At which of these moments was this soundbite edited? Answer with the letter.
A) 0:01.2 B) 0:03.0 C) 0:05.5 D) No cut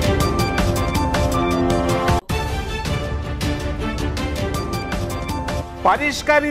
D